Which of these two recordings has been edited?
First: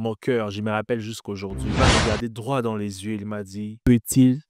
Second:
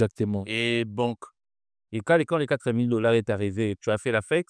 first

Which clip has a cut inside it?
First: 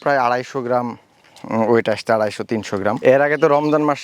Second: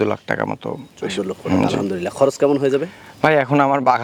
first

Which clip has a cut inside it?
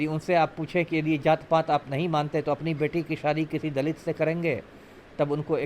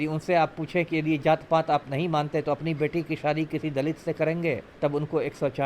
second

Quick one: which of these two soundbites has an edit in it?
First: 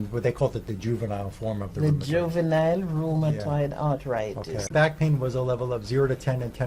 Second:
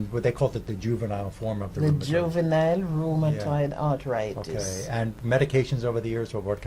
first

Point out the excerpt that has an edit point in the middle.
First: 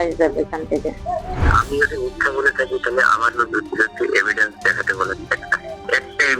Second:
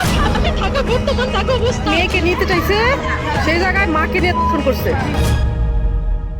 first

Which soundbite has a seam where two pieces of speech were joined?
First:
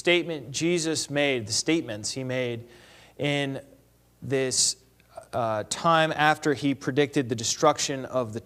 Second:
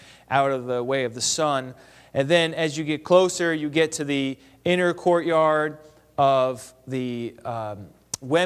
second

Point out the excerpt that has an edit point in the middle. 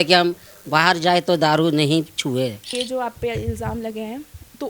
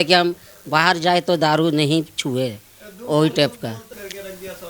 first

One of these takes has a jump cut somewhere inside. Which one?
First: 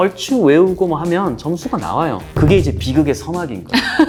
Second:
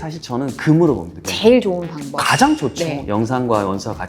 second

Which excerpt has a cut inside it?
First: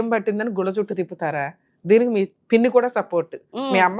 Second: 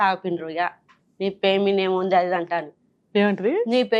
first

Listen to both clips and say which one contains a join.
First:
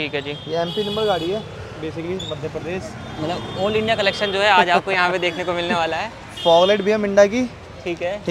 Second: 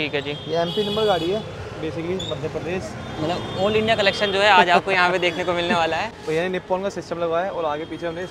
second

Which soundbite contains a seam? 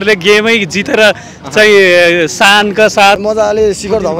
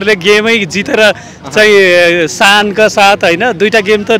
first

